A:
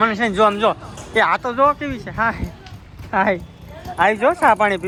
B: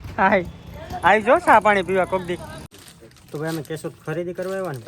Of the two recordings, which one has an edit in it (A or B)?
B